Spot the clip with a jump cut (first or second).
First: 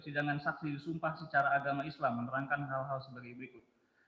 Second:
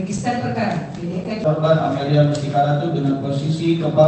second